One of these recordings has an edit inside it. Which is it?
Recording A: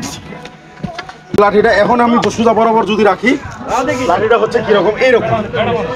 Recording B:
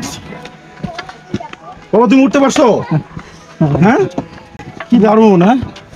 A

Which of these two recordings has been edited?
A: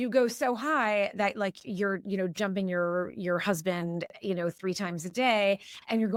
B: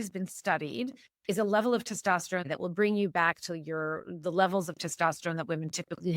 B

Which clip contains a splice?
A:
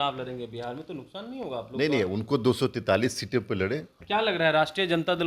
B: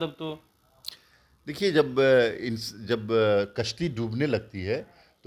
A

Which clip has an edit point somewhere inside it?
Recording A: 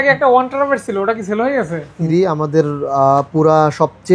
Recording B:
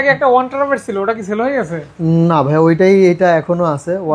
A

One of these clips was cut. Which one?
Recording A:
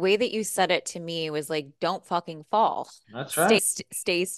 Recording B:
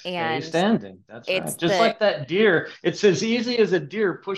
A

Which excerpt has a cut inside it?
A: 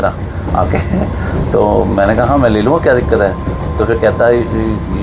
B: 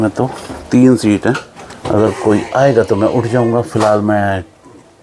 B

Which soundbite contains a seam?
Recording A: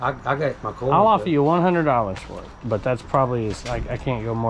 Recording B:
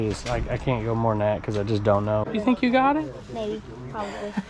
B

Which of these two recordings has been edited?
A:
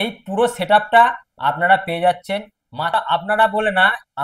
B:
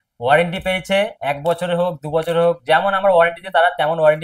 A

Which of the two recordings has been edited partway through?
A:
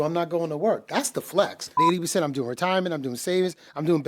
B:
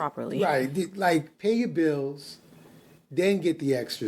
A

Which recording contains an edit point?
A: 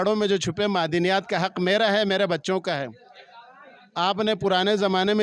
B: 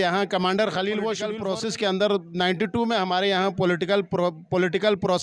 B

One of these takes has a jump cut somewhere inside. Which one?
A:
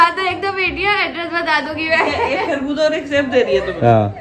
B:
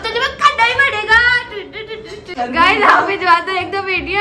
B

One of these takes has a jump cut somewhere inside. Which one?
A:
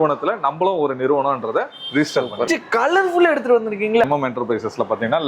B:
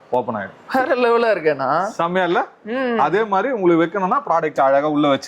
A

